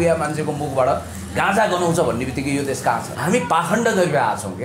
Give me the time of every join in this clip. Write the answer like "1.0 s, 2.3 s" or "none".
3.1 s